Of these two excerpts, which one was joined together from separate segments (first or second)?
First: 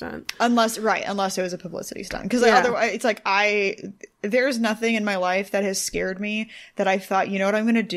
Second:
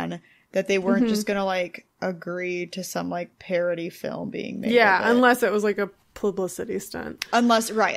second